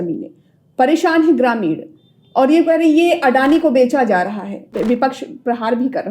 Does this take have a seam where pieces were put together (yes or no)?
yes